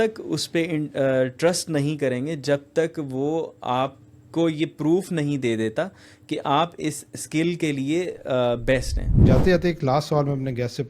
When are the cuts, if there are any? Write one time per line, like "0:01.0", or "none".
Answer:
0:09.2